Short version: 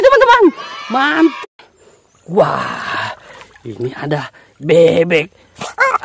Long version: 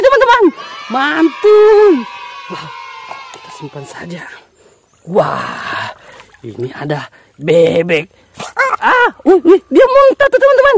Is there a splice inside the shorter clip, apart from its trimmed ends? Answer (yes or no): yes